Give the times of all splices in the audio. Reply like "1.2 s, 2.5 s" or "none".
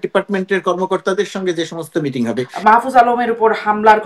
2.5 s

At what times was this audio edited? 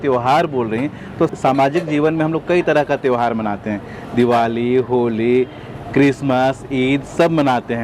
1.3 s

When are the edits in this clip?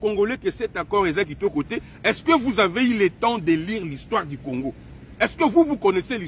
none

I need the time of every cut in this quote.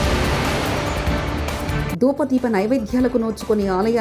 1.7 s

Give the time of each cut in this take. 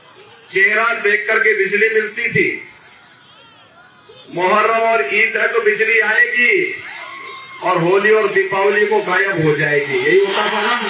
none

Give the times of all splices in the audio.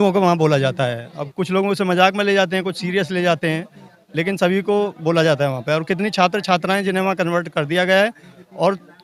none

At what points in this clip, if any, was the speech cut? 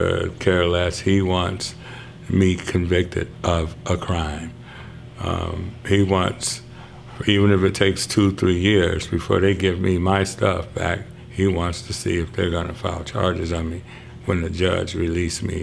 none

